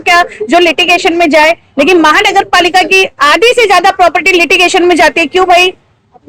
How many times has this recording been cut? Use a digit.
0